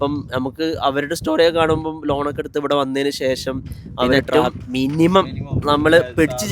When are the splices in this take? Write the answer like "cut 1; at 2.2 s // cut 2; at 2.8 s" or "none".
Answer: cut 1; at 4.2 s